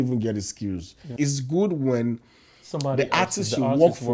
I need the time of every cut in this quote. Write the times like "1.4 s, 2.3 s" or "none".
1.0 s